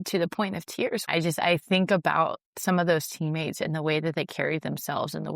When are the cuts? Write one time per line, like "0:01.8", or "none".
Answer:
0:01.1